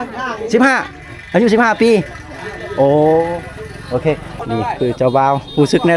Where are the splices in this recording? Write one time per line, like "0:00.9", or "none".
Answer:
0:04.4